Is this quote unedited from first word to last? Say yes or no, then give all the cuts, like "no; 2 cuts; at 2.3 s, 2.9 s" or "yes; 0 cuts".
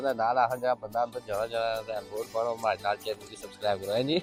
yes; 0 cuts